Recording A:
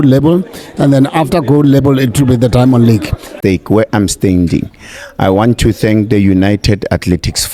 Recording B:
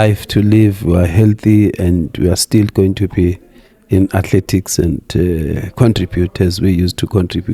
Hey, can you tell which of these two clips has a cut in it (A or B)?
A